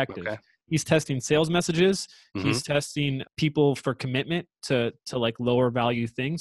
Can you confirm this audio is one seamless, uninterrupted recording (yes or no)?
no